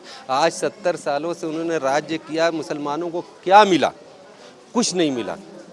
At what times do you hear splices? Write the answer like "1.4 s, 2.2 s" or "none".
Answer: none